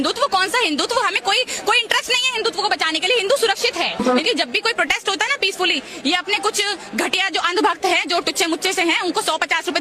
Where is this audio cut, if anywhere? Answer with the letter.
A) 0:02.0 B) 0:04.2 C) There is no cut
B